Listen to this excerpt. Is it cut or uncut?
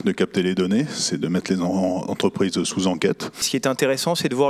cut